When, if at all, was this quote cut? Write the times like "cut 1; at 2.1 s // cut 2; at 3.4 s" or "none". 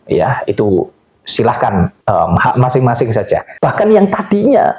cut 1; at 2.0 s // cut 2; at 3.5 s